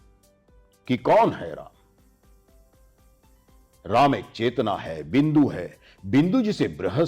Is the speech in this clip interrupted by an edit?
no; 0 cuts

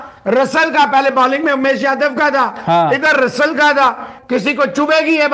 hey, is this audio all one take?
no; 1 cut; at 4.1 s

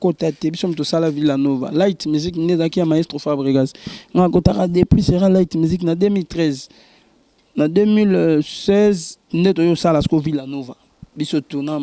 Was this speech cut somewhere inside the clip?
no; 0 cuts

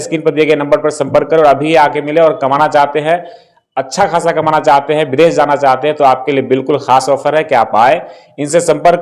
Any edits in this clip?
no; 0 cuts

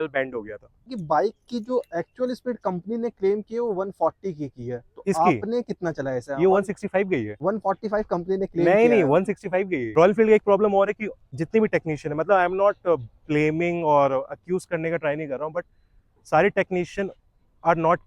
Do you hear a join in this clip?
yes; 2 cuts; at 0.9 s, 9.8 s

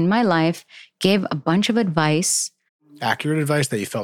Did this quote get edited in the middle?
yes; 1 cut; at 3.0 s

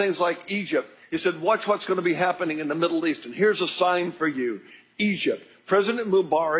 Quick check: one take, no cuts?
no; 1 cut; at 2.9 s

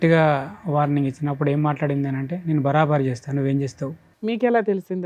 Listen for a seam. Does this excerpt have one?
yes; 1 cut; at 4.0 s

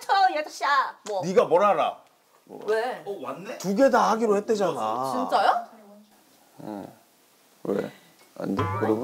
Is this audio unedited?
no; 1 cut; at 1.0 s

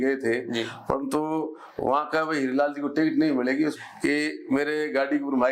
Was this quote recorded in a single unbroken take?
no; 1 cut; at 3.8 s

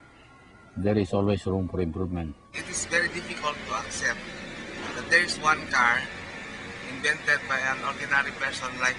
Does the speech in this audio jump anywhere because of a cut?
no; 0 cuts

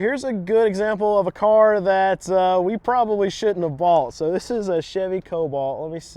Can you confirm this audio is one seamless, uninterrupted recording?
yes; 0 cuts

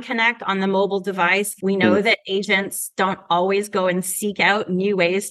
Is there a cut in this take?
yes; 1 cut; at 1.5 s

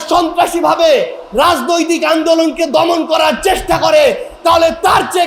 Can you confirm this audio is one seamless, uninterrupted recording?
yes; 0 cuts

